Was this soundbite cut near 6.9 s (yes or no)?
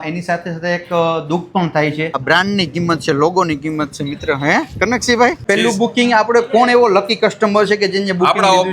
no